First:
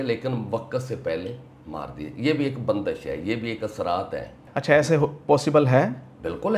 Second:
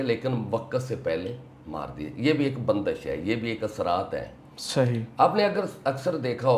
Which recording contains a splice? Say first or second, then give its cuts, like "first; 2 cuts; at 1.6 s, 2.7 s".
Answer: first; 1 cut; at 4.4 s